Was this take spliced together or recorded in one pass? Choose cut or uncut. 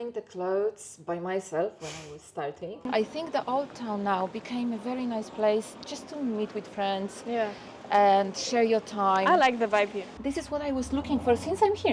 cut